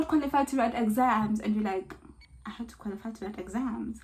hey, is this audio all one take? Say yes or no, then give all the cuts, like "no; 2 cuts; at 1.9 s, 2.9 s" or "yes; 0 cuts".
yes; 0 cuts